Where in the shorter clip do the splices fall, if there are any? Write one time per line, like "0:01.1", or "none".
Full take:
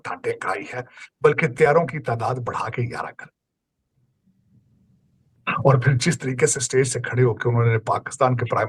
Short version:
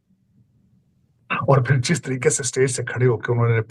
none